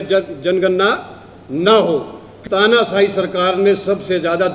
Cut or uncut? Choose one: cut